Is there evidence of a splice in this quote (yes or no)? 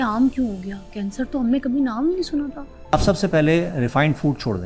yes